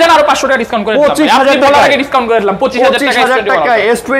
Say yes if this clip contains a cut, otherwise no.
no